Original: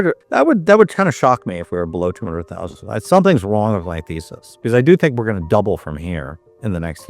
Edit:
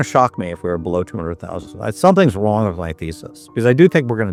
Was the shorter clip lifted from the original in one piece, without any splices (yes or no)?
yes